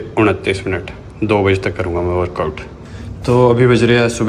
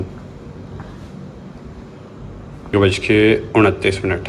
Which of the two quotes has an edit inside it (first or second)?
first